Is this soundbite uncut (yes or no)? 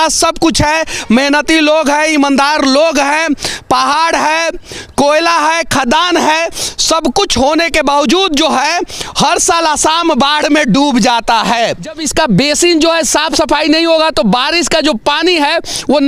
no